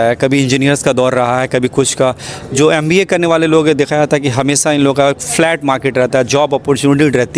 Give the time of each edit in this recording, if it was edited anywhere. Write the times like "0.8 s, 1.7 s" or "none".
none